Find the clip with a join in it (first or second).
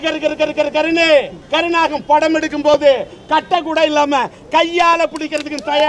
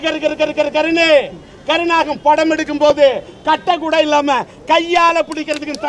first